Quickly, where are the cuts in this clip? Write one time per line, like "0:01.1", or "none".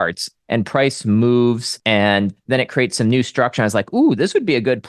0:01.7